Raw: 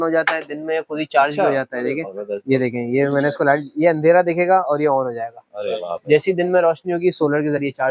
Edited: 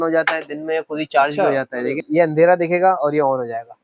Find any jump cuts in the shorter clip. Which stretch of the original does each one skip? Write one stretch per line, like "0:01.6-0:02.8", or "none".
0:02.0-0:03.7